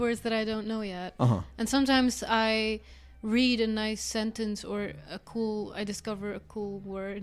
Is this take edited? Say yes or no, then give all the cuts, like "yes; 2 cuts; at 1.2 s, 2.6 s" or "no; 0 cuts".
no; 0 cuts